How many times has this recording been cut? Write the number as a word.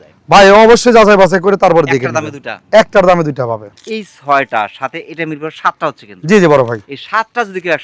one